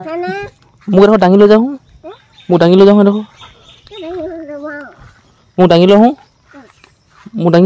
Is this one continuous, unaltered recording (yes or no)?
yes